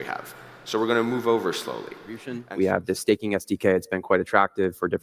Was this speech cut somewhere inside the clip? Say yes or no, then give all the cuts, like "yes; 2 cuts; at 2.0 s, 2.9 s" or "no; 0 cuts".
yes; 1 cut; at 2.4 s